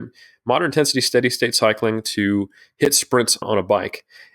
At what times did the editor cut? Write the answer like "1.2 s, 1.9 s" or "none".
3.3 s